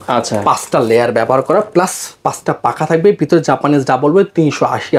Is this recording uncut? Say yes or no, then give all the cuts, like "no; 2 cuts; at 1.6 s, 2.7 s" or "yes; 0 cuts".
yes; 0 cuts